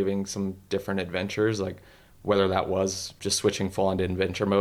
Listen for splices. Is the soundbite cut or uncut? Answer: cut